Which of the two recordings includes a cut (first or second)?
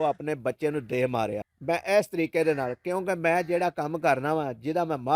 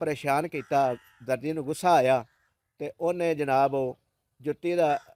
first